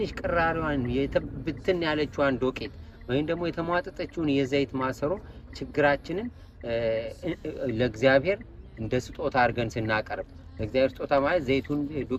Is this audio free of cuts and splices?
yes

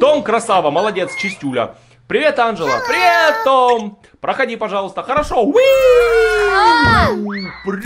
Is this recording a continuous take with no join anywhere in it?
yes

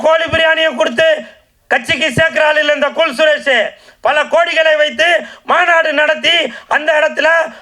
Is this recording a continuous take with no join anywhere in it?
yes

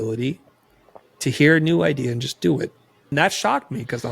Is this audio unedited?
no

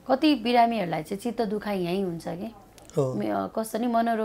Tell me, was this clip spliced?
no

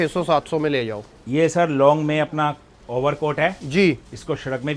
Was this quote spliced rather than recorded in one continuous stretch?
no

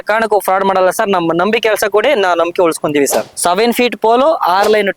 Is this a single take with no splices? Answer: no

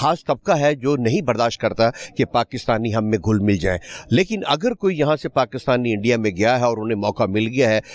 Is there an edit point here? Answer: no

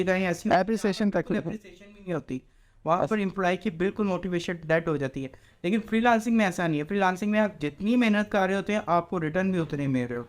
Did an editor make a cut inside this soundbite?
no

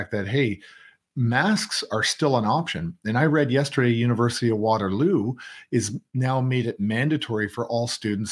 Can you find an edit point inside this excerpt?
no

